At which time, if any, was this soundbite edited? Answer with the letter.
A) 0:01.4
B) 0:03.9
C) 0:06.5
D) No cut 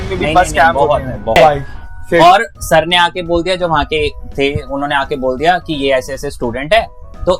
A